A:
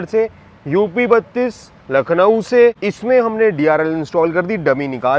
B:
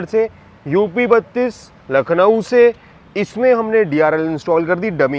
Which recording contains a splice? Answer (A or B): A